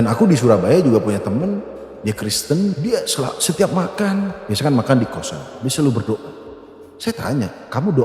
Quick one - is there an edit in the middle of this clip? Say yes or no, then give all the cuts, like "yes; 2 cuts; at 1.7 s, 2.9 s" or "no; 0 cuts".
yes; 1 cut; at 2.7 s